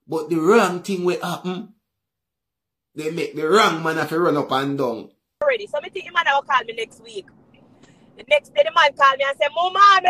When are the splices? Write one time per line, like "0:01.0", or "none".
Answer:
0:05.4